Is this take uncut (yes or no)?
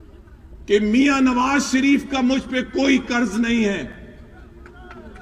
yes